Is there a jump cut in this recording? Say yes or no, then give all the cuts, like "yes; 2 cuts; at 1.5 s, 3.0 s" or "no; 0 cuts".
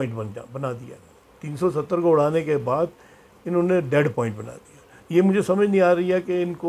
no; 0 cuts